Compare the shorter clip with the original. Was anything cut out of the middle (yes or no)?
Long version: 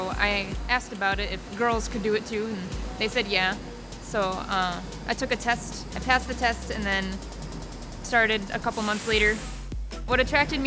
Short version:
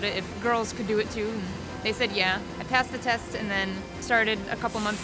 yes